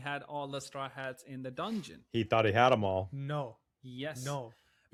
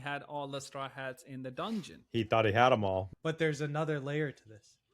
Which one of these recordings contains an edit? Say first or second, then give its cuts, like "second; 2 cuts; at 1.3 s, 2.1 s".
second; 1 cut; at 3.1 s